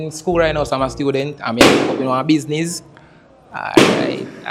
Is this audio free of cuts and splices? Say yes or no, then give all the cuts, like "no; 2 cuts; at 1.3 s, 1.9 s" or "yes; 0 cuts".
yes; 0 cuts